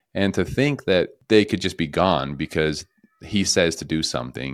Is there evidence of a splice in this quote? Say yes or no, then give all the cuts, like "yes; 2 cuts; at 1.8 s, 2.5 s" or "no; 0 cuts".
yes; 1 cut; at 1.2 s